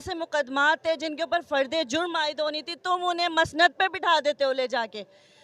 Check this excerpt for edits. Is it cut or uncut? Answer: uncut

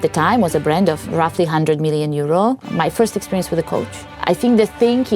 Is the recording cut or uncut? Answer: cut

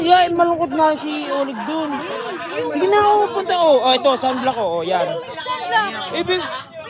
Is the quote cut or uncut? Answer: uncut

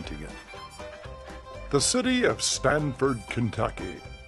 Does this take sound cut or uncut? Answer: uncut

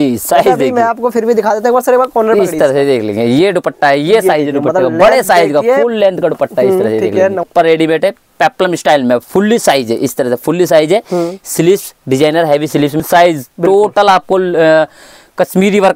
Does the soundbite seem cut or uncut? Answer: cut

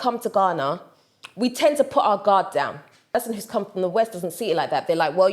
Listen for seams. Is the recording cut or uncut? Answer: cut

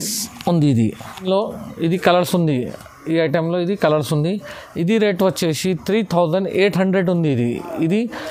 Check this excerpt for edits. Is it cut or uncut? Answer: uncut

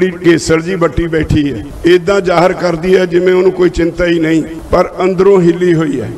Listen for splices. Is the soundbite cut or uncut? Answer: cut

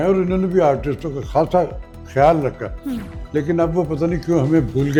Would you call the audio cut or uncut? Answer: uncut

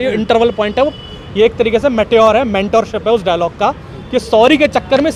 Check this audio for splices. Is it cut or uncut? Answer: uncut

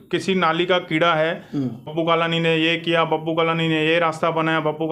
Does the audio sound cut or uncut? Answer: cut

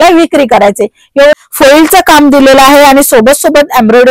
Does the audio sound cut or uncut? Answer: cut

